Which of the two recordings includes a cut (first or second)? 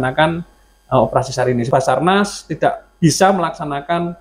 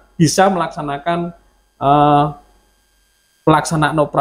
first